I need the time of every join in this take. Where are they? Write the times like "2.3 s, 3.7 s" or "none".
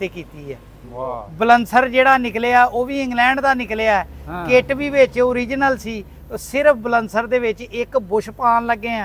none